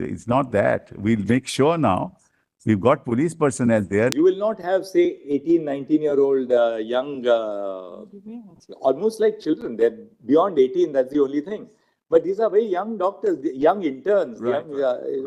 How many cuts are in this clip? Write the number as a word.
one